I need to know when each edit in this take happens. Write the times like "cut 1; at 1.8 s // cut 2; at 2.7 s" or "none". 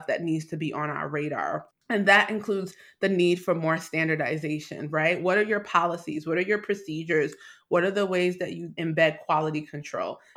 cut 1; at 1.7 s